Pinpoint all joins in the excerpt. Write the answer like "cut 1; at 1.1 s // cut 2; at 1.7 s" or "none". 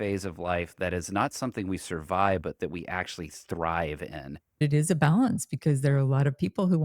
cut 1; at 4.6 s